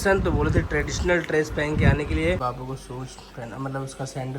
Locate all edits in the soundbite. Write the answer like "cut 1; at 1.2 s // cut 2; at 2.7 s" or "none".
cut 1; at 2.4 s